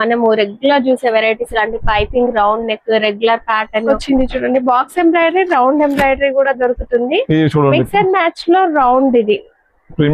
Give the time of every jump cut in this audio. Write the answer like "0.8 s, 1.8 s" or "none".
3.8 s